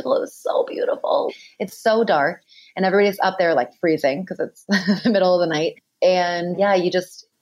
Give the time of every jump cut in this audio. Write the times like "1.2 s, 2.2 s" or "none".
none